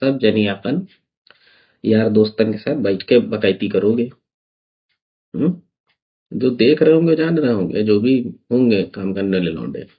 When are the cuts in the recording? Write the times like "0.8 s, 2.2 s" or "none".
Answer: none